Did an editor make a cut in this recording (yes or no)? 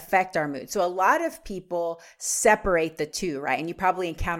no